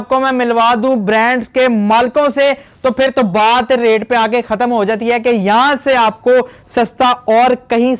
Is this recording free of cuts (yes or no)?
yes